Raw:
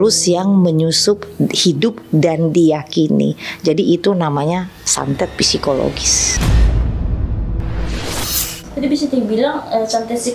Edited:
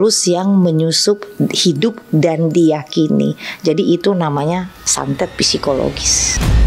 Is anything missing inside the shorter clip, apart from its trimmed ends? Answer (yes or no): no